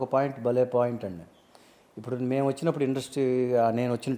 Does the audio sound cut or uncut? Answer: uncut